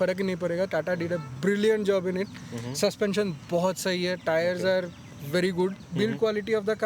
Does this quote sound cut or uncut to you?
cut